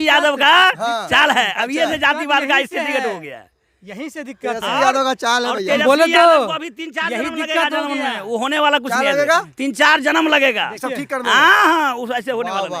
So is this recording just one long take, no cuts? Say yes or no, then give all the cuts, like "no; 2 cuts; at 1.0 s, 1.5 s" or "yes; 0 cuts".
yes; 0 cuts